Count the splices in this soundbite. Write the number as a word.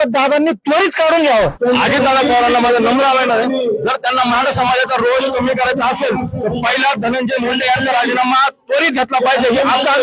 one